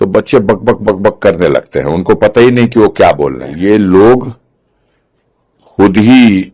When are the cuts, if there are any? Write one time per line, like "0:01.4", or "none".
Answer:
0:03.5